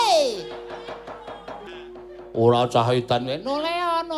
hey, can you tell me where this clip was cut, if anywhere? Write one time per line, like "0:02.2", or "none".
0:01.7